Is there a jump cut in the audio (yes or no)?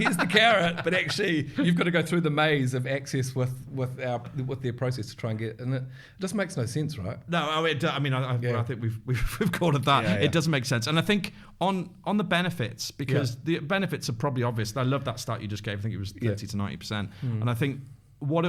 no